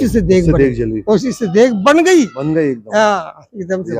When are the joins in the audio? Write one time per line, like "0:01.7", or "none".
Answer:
none